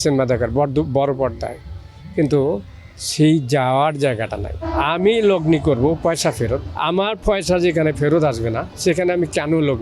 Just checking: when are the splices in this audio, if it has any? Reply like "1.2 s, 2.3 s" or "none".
4.6 s, 6.7 s, 8.7 s